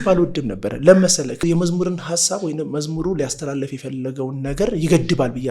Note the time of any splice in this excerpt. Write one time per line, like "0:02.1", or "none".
0:01.4

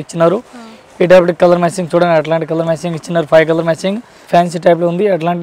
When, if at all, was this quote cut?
0:04.2

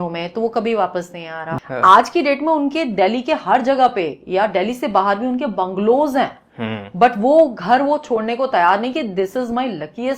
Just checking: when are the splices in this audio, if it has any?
0:01.5

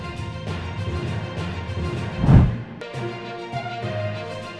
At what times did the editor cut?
0:02.5

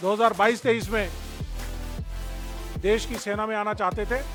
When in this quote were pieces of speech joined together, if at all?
none

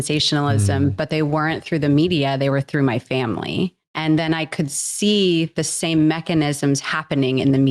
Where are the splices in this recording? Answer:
0:03.9

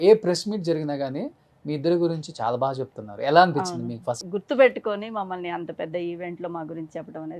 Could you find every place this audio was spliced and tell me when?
0:04.2

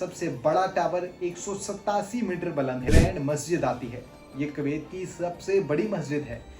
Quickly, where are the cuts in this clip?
0:02.8

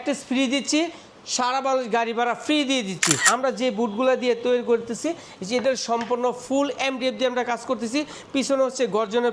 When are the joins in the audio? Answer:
0:03.2

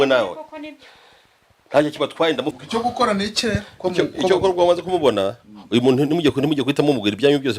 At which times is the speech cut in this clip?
0:02.6

